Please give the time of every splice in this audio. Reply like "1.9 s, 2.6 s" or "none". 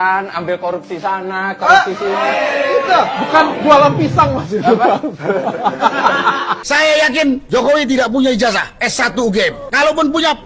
6.6 s